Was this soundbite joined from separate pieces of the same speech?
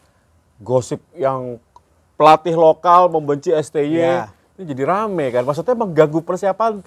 no; 0 cuts

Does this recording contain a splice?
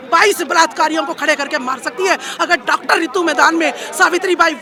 no; 0 cuts

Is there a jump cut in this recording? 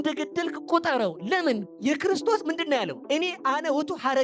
yes; 2 cuts; at 1.7 s, 2.9 s

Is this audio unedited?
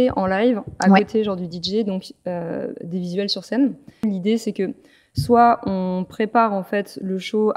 no; 1 cut; at 4.0 s

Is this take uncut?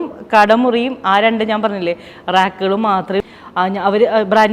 no; 1 cut; at 3.2 s

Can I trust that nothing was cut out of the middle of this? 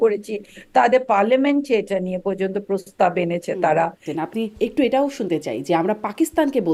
no; 1 cut; at 4.1 s

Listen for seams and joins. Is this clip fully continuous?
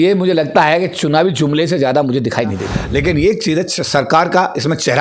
no; 1 cut; at 2.7 s

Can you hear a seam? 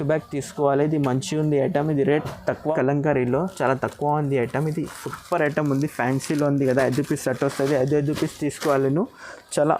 yes; 1 cut; at 2.6 s

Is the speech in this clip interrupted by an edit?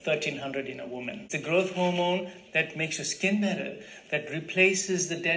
yes; 1 cut; at 1.2 s

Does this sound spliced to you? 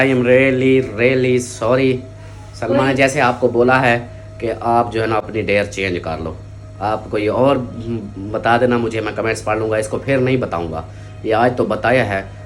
no; 0 cuts

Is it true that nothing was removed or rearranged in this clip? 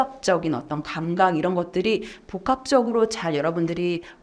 yes; 0 cuts

